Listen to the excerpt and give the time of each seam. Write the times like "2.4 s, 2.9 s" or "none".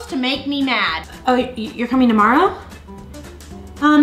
1.0 s